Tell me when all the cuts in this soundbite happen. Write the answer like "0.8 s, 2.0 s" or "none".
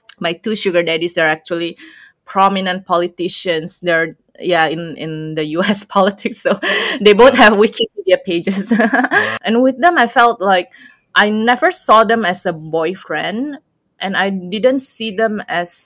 9.3 s